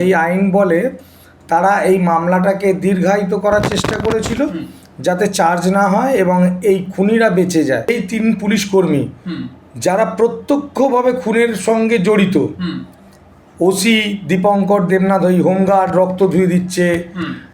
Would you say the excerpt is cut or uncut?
cut